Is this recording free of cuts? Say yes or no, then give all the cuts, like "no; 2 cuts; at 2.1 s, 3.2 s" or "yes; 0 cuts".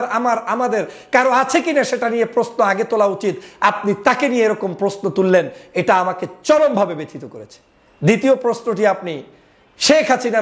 yes; 0 cuts